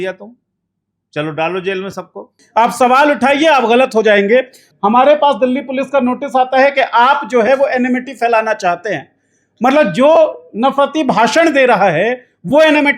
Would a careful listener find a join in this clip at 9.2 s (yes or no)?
no